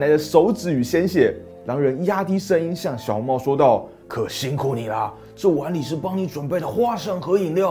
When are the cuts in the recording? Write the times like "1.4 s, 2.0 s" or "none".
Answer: none